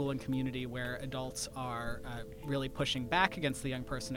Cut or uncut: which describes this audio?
uncut